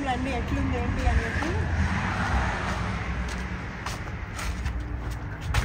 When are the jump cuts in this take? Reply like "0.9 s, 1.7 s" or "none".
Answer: none